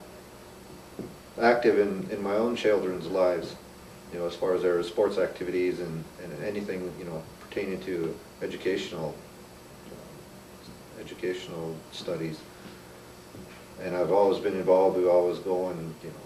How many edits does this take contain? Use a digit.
0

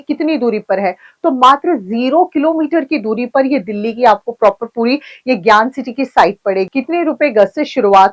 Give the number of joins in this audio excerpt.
1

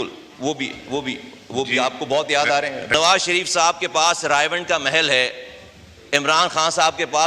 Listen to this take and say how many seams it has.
1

